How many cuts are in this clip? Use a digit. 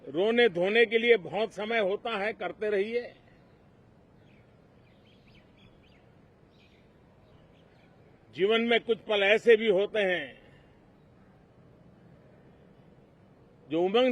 0